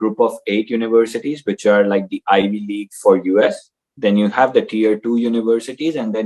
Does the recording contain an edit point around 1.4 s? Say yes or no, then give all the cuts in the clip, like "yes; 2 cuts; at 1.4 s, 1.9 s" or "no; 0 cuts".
no; 0 cuts